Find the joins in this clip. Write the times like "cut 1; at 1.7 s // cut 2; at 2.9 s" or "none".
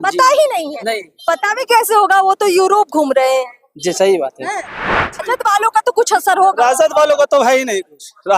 cut 1; at 5.2 s

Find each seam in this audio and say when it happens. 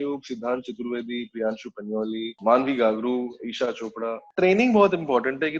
cut 1; at 2.3 s // cut 2; at 4.2 s

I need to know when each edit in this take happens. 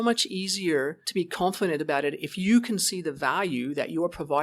cut 1; at 1.0 s

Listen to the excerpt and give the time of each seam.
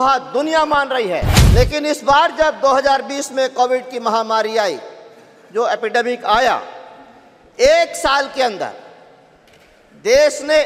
cut 1; at 1.4 s

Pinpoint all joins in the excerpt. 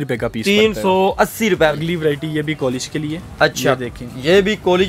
cut 1; at 1.7 s

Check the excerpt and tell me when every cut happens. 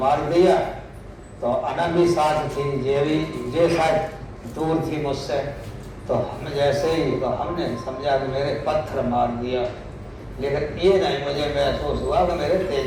none

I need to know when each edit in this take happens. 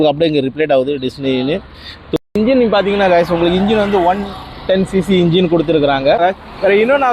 none

